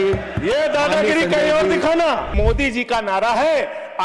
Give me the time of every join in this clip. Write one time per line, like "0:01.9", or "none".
0:02.3